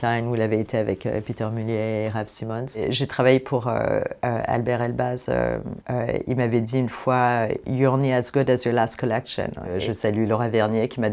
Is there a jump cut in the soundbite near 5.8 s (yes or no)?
yes